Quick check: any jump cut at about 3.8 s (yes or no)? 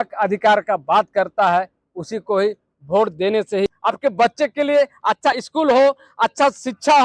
yes